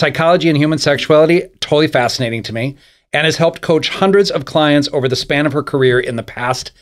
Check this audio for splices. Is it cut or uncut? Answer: uncut